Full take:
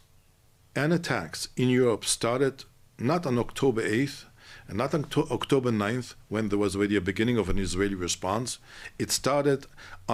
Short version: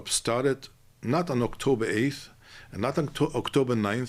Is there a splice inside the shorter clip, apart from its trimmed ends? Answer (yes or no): no